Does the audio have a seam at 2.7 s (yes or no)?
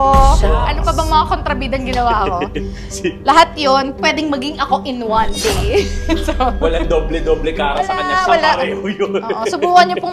no